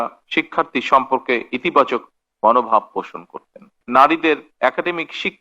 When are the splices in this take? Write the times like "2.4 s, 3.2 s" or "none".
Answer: 3.8 s